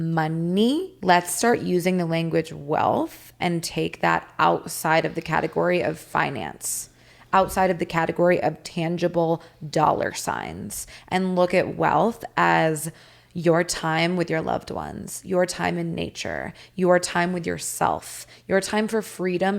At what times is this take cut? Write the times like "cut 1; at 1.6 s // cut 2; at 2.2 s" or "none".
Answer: cut 1; at 0.9 s